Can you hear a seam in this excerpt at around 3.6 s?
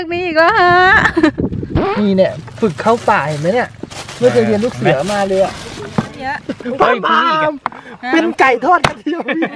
no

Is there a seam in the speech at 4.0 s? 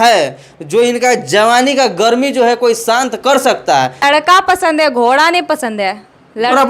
yes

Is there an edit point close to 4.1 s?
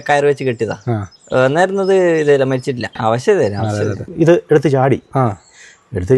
yes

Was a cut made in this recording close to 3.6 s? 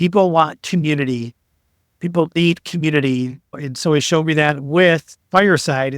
yes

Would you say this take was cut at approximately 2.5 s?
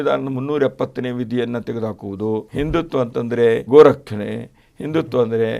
yes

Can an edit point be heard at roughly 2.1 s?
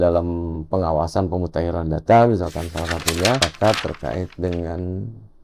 no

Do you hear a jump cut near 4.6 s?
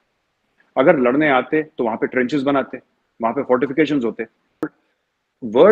yes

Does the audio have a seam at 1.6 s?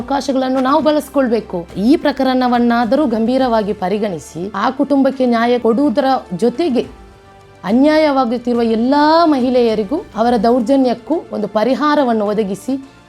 yes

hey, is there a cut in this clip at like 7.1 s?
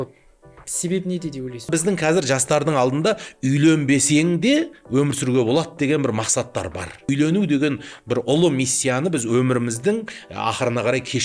yes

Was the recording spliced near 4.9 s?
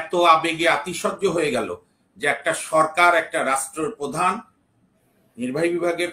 no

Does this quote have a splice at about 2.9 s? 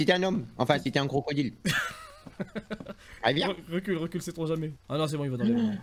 no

